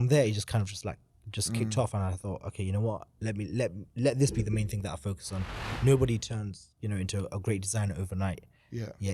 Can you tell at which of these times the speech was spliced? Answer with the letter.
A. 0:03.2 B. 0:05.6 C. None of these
B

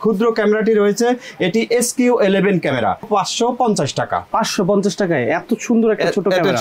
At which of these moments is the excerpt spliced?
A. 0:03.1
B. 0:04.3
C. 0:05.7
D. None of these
A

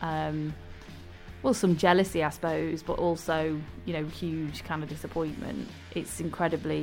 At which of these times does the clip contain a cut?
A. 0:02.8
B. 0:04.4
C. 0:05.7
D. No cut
C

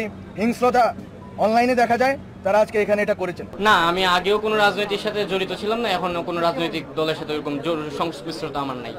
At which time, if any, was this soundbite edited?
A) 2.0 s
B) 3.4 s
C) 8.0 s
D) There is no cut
B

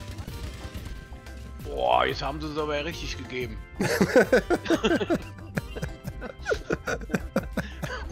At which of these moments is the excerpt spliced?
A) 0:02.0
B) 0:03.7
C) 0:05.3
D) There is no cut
D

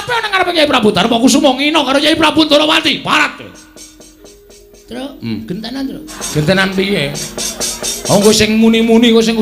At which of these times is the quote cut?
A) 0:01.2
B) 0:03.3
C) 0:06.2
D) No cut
C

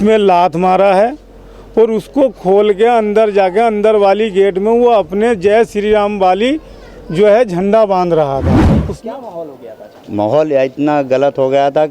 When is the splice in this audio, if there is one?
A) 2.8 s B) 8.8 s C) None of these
B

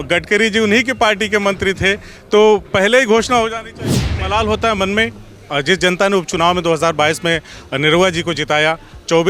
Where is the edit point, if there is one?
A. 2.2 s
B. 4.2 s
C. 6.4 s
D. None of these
B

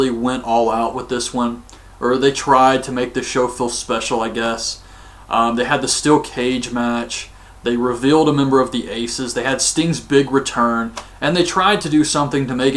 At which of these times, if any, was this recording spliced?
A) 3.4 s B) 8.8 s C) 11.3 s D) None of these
B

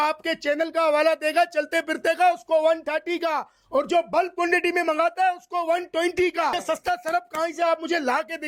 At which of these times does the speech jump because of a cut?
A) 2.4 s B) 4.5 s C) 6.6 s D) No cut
C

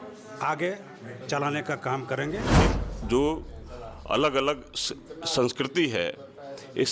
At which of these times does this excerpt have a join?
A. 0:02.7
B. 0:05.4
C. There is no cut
A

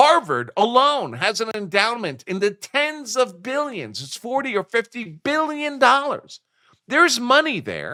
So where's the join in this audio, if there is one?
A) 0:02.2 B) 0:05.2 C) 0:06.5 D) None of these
D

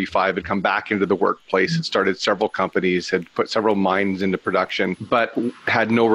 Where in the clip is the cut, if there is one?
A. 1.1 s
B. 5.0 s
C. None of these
B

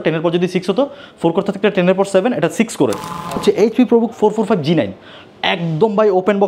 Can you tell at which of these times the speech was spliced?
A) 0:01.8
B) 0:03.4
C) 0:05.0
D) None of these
B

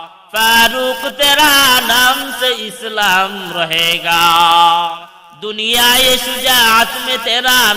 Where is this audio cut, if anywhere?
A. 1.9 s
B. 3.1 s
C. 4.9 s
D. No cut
C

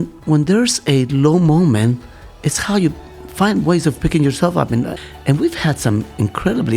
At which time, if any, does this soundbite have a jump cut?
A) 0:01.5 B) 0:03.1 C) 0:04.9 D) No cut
C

